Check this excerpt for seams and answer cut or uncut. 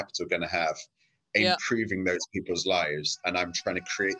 uncut